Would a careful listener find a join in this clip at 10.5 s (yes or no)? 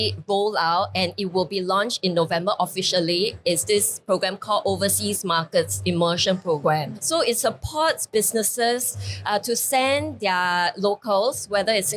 no